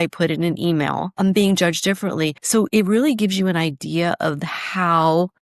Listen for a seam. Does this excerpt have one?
yes; 2 cuts; at 1.1 s, 2.4 s

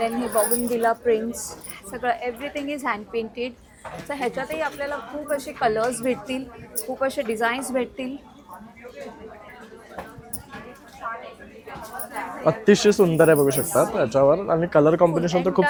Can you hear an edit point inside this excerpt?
no; 0 cuts

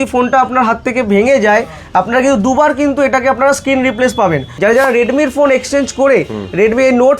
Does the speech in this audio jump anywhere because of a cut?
yes; 1 cut; at 4.5 s

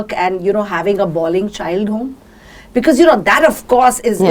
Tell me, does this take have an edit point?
no; 0 cuts

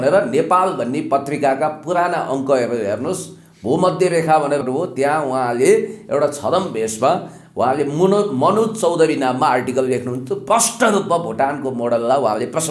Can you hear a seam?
no; 0 cuts

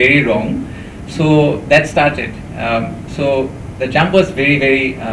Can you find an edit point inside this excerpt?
no; 0 cuts

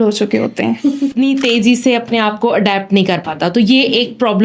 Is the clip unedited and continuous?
no; 1 cut; at 1.1 s

